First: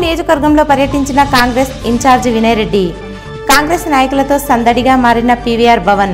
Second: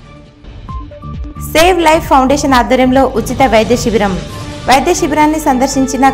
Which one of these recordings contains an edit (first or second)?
second